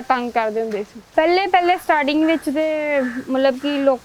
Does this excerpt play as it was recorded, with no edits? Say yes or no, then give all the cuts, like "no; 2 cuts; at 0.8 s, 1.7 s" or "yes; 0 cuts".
no; 1 cut; at 1.0 s